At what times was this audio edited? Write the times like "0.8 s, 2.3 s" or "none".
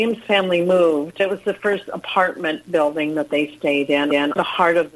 1.2 s

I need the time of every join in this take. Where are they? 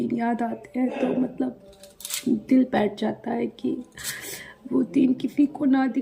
none

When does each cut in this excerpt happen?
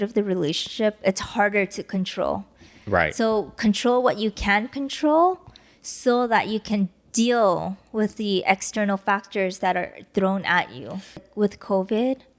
11.2 s

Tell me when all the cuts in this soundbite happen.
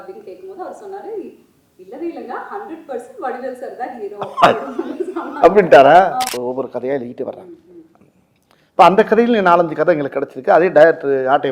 6.3 s

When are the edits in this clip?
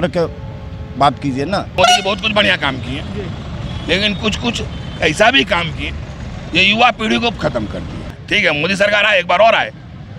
1.7 s, 8.1 s

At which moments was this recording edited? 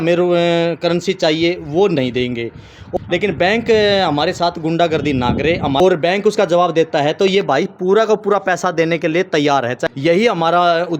2.9 s, 5.8 s, 9.8 s

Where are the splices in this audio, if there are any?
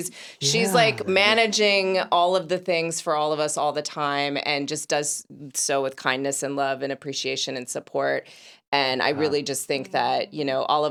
none

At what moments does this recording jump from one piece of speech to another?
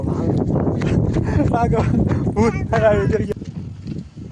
3.3 s

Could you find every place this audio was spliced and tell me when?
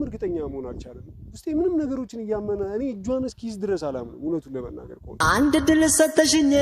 5.1 s

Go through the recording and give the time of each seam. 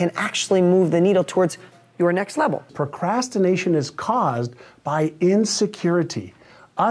2.7 s

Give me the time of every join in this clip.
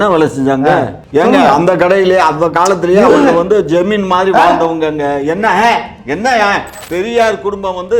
1.0 s, 6.7 s

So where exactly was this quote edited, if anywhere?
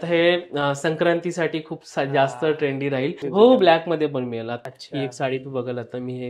3.2 s, 4.6 s

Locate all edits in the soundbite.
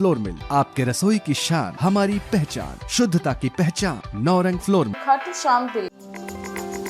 5.8 s

